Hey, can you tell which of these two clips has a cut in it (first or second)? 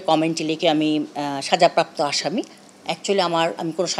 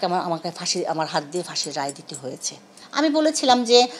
second